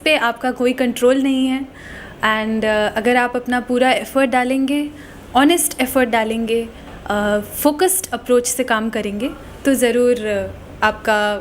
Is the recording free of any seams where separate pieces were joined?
yes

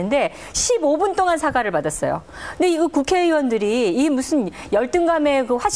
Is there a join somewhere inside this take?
yes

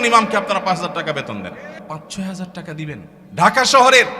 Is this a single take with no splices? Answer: no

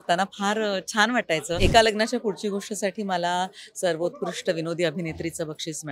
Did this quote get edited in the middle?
yes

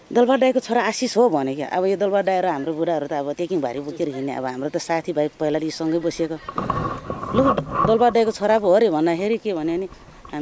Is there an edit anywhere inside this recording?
no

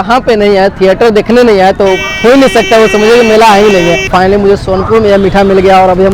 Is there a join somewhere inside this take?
yes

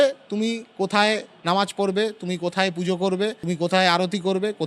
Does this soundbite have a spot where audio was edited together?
yes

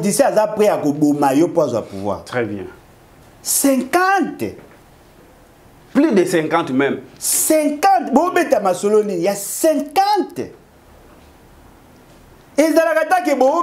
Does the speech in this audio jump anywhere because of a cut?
no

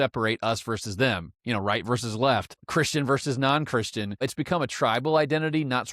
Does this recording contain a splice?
yes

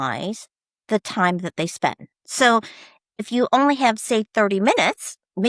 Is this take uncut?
no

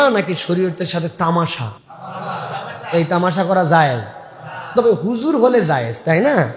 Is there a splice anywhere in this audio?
no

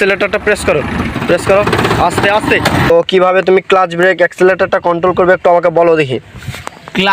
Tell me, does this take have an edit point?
yes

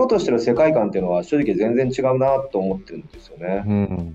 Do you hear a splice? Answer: no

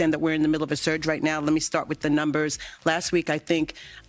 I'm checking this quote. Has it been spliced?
no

